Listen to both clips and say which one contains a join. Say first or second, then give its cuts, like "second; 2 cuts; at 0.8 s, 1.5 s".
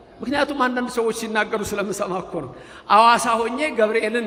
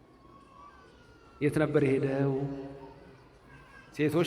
second; 1 cut; at 1.4 s